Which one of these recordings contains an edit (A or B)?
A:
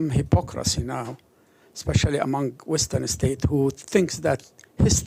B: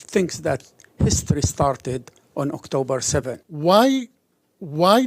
B